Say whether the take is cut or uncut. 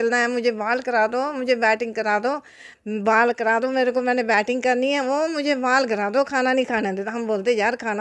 uncut